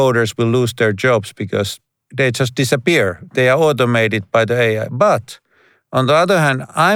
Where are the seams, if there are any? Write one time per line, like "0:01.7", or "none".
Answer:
0:02.1
0:03.2